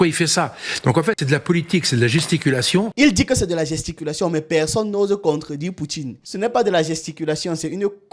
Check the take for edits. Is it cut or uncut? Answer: cut